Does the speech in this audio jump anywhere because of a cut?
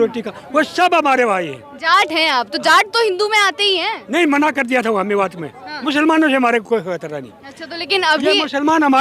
yes; 1 cut; at 5.8 s

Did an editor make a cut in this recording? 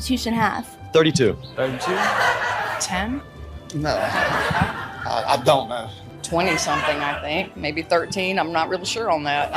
yes; 1 cut; at 5.9 s

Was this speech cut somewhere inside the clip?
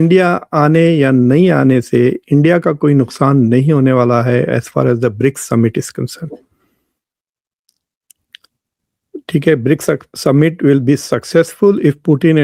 no; 0 cuts

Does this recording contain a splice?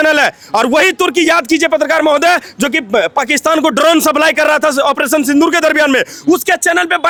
no; 0 cuts

